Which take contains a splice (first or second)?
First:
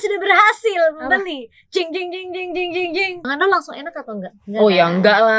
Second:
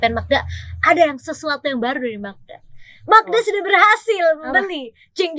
first